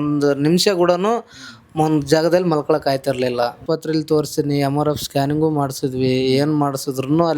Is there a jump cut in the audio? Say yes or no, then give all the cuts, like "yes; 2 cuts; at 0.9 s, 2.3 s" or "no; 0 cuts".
yes; 1 cut; at 3.6 s